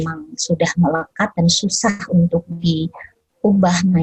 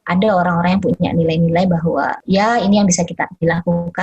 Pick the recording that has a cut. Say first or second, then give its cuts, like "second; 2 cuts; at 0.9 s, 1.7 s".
second; 1 cut; at 2.2 s